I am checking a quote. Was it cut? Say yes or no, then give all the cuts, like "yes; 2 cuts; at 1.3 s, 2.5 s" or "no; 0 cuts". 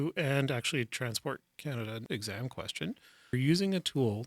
yes; 2 cuts; at 2.0 s, 3.3 s